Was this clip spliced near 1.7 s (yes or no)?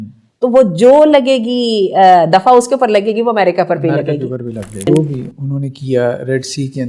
no